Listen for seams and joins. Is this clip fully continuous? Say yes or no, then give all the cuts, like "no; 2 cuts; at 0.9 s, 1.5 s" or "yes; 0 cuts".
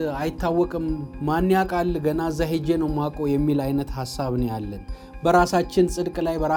yes; 0 cuts